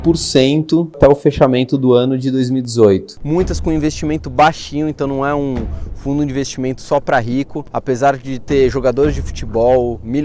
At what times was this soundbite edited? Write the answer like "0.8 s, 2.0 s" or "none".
3.2 s